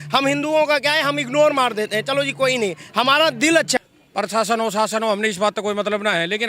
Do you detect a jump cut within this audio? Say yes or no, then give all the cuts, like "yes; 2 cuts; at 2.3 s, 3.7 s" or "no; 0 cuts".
yes; 1 cut; at 3.8 s